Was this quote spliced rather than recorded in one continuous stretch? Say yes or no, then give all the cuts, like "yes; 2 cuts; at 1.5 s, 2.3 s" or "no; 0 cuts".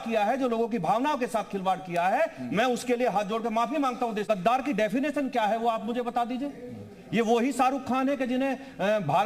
yes; 1 cut; at 4.2 s